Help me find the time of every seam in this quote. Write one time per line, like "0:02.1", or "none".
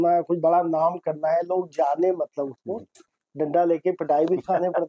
0:03.1